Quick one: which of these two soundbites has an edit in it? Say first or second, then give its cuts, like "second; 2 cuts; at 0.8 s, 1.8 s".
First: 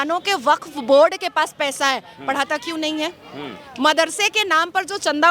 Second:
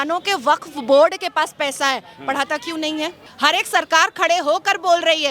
second; 1 cut; at 3.2 s